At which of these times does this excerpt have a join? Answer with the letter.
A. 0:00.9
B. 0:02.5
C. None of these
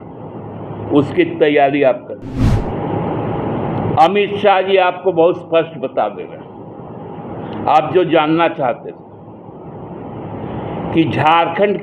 B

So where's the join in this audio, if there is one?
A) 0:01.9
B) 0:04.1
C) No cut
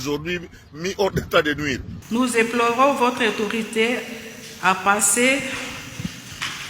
A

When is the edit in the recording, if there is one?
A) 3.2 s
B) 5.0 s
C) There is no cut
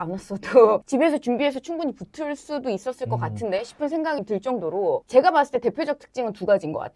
B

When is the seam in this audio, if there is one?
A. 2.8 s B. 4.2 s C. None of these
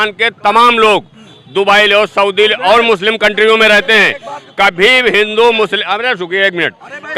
C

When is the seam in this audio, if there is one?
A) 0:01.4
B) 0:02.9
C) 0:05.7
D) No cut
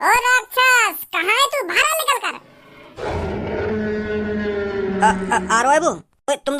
D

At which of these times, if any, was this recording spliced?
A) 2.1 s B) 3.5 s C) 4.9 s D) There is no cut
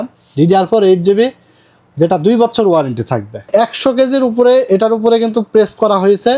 B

